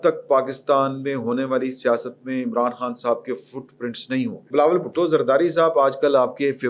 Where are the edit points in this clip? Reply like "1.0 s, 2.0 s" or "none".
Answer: 4.5 s